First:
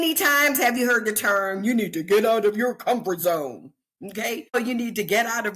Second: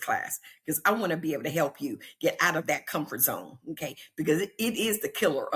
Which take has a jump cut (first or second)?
first